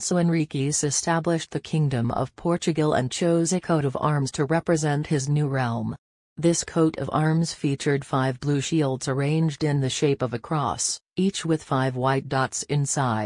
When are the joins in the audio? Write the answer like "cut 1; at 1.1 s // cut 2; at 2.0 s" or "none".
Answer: cut 1; at 6.7 s